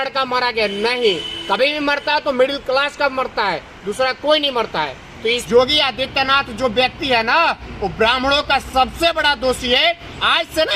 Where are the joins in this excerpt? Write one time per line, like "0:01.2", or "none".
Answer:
0:05.4